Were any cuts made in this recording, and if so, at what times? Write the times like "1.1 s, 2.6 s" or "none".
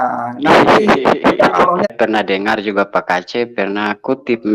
1.9 s